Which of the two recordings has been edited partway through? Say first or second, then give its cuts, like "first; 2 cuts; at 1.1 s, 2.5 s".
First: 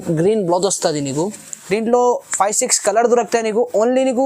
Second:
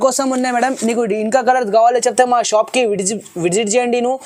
first; 1 cut; at 1.5 s